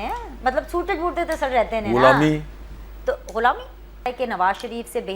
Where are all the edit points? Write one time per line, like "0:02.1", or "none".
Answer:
0:04.1

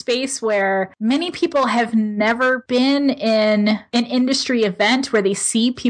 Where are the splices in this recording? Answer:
0:00.9
0:02.6
0:03.8

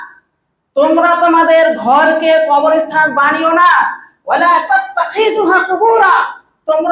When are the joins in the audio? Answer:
none

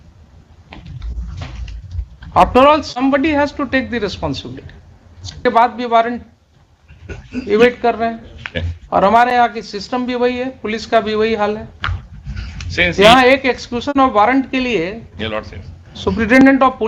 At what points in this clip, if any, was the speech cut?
0:05.5

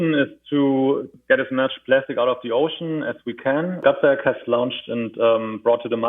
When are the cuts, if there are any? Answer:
0:01.1
0:03.8

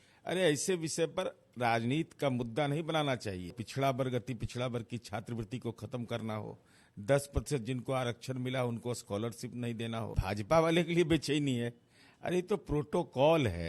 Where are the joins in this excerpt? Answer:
0:03.6
0:10.2

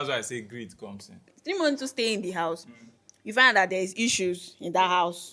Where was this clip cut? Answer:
0:01.3

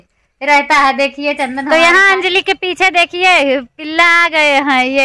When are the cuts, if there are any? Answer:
0:01.6

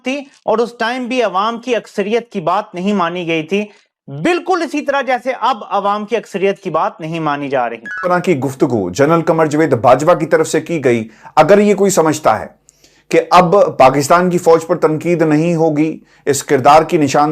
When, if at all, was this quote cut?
none

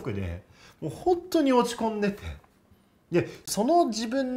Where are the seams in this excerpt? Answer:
0:03.4

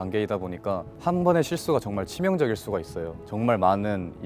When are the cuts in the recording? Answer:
0:00.9
0:03.2

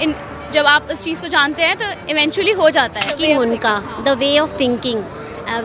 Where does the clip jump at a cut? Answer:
0:03.2

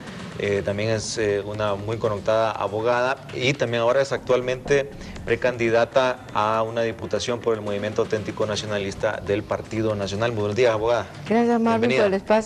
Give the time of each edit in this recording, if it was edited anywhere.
none

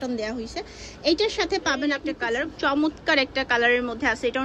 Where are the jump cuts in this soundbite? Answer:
0:02.1

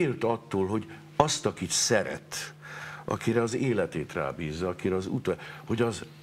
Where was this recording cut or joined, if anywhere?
none

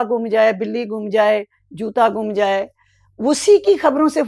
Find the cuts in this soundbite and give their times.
none

